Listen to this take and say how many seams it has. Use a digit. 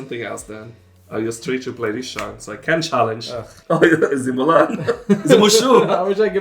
1